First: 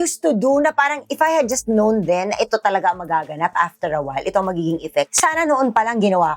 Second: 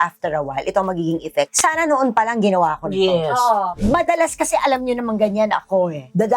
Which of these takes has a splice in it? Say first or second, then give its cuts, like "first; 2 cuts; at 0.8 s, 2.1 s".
second; 1 cut; at 3.8 s